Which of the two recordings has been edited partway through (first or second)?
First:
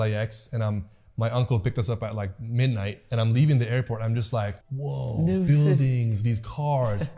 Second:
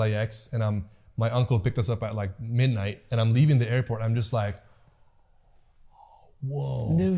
first